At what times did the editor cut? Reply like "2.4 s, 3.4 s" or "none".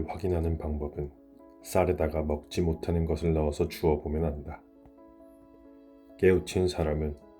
4.6 s, 6.2 s